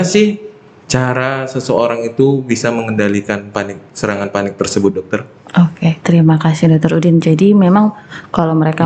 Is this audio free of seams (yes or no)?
yes